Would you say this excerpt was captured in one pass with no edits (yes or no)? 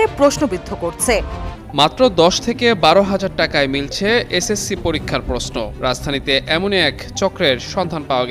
no